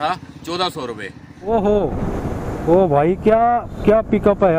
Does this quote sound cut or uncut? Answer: cut